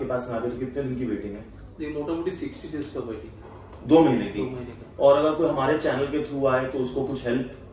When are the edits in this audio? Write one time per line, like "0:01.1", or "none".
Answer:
none